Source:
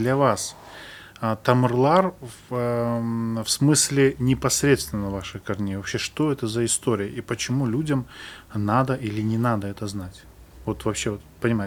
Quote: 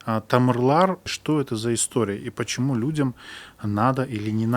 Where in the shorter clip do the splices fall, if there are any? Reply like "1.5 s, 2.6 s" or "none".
1.1 s